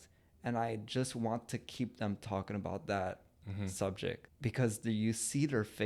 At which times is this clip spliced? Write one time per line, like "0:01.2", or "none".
0:04.3